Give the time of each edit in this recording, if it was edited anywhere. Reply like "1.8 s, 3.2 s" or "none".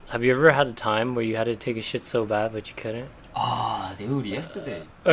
none